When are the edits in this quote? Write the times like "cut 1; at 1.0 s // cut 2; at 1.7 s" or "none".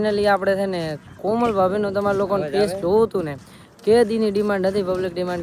none